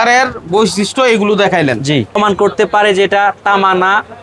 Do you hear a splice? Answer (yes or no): yes